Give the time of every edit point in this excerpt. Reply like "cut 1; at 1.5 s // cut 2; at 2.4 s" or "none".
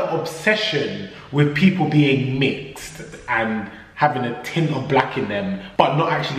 none